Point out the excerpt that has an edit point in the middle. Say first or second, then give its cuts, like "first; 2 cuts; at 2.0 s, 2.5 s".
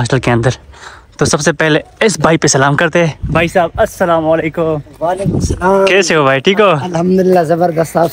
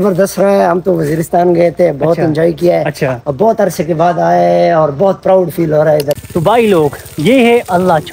second; 1 cut; at 6.2 s